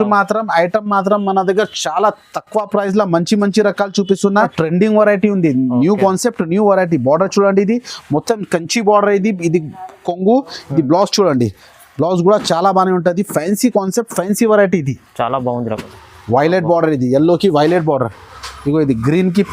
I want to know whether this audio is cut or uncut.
cut